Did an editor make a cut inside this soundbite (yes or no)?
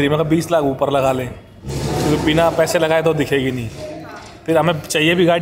no